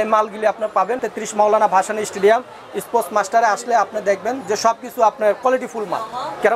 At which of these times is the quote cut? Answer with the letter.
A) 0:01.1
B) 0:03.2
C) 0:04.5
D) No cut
A